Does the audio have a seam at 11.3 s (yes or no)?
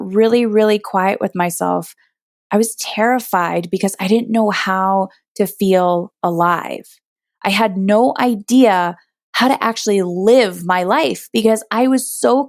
no